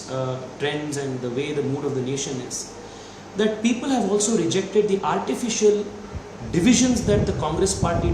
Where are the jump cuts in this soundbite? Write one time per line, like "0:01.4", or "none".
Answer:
none